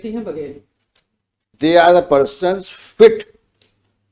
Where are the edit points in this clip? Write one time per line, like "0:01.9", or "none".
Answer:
0:01.5